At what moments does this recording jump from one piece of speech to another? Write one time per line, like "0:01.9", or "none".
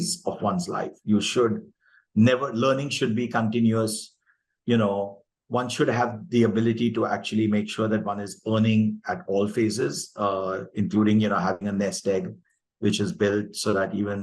none